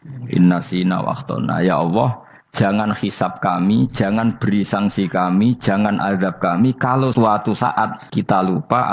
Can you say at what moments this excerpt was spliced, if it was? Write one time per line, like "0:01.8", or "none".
0:07.1
0:08.0

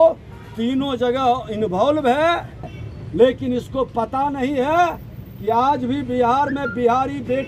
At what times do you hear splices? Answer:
0:02.7

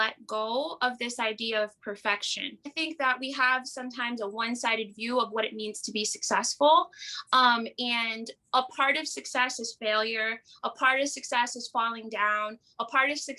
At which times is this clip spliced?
0:02.7

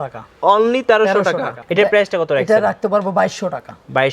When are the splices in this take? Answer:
0:01.6

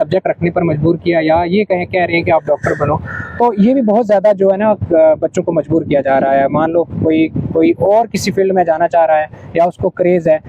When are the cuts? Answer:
none

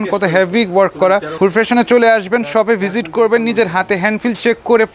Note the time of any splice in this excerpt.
0:01.3

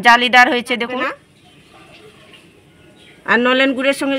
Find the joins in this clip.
0:01.3

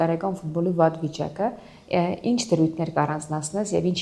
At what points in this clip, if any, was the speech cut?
none

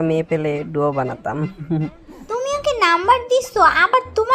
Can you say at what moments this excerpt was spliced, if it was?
0:02.2

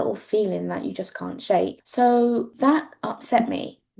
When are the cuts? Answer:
0:01.8
0:02.5

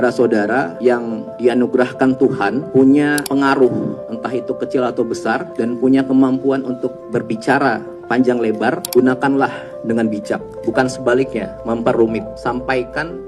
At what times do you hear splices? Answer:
0:00.9
0:02.6
0:03.2
0:04.1
0:05.5
0:08.8
0:10.5
0:11.5
0:12.3

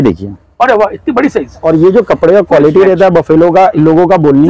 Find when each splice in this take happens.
0:01.6

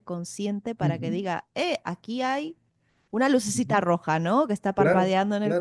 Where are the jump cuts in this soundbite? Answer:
none

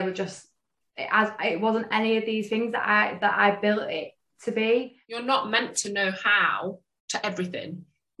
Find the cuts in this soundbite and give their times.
0:05.1

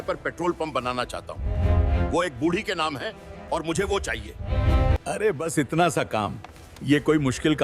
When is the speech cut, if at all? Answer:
none

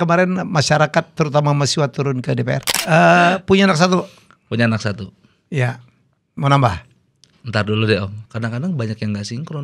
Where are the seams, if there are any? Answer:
0:02.7
0:08.2

